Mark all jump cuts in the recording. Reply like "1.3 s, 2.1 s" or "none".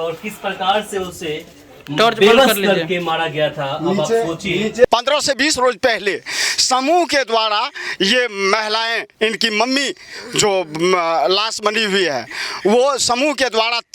4.8 s